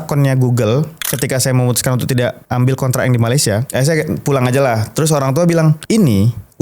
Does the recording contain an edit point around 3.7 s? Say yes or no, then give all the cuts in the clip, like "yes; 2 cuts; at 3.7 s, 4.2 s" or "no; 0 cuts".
yes; 4 cuts; at 1.0 s, 2.4 s, 3.7 s, 5.8 s